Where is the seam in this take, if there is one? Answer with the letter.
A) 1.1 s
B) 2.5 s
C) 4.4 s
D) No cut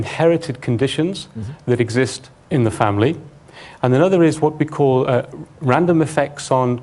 D